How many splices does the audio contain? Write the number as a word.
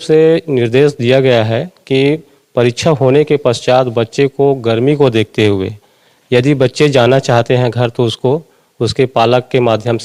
zero